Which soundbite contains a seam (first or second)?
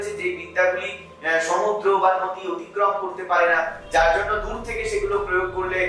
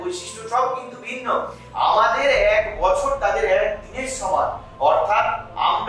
second